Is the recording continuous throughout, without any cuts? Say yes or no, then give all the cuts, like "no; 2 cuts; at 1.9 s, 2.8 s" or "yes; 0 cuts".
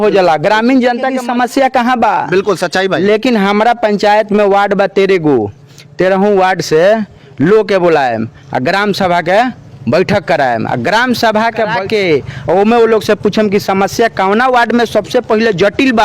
no; 2 cuts; at 1.2 s, 11.7 s